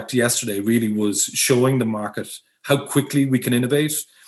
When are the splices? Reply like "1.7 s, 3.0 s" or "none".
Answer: none